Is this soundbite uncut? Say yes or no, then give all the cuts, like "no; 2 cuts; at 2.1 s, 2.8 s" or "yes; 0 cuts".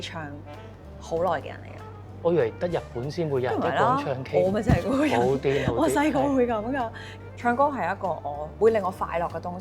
yes; 0 cuts